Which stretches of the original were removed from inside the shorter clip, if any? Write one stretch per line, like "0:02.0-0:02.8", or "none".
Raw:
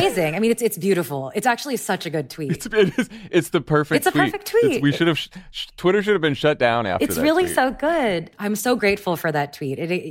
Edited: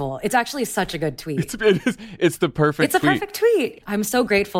0:04.8-0:08.2